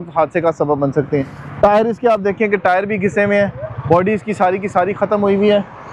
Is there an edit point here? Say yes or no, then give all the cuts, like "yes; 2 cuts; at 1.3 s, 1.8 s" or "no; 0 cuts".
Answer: no; 0 cuts